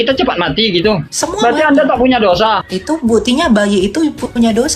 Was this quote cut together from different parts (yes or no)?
yes